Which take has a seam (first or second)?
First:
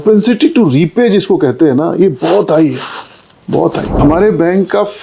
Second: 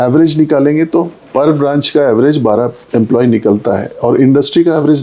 first